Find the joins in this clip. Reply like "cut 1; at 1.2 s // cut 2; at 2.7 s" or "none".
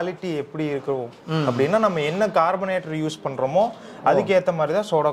none

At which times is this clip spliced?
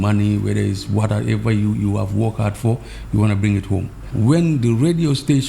cut 1; at 4.0 s

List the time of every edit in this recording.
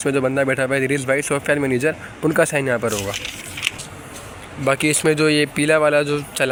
none

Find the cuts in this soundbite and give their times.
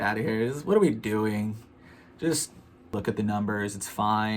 cut 1; at 2.6 s

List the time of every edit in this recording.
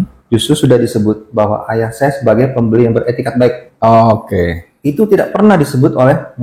none

